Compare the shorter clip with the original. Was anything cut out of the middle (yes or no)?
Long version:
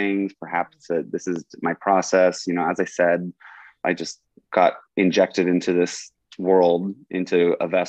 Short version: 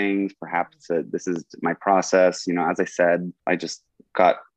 yes